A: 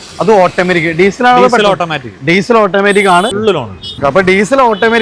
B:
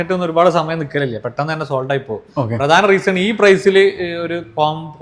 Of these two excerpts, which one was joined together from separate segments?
A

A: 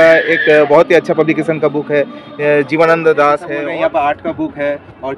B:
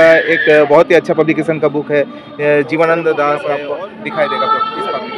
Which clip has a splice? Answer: A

